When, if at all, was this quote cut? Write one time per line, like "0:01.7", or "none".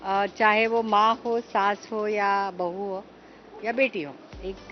none